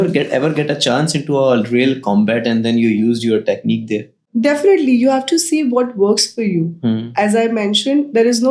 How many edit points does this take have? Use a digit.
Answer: 1